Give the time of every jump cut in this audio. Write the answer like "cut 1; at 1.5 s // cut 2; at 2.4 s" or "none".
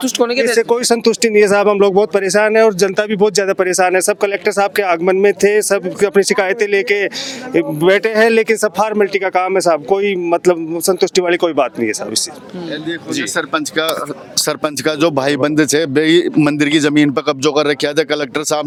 none